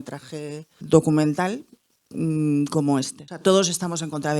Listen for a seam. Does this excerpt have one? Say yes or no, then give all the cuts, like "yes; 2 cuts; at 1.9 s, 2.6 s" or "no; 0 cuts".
yes; 2 cuts; at 0.8 s, 3.2 s